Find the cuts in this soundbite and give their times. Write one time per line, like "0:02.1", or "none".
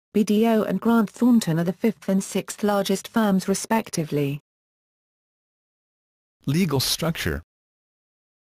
none